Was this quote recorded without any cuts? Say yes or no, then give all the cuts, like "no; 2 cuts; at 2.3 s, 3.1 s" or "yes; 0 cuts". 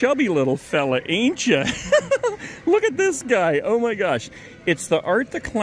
yes; 0 cuts